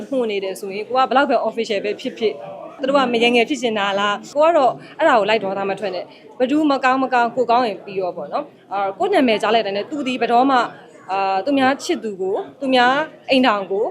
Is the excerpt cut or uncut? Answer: cut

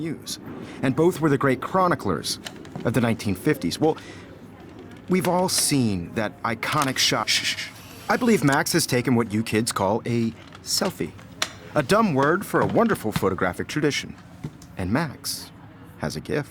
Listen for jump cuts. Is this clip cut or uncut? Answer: cut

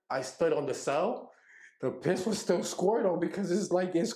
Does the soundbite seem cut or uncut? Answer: uncut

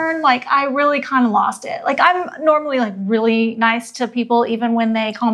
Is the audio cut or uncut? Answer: uncut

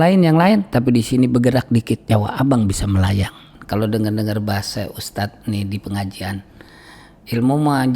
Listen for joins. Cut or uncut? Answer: cut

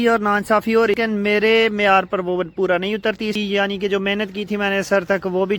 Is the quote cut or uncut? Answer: cut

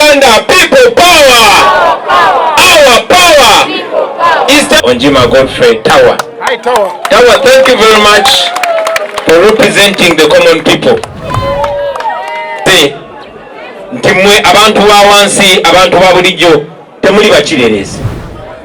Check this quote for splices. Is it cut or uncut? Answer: cut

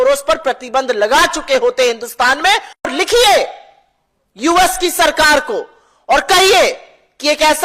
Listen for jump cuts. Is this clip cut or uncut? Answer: cut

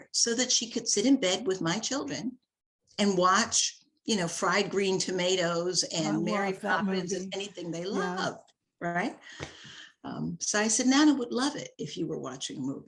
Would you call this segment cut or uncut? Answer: uncut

